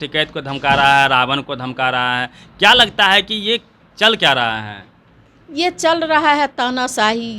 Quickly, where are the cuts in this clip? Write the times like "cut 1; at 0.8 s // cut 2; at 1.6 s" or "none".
none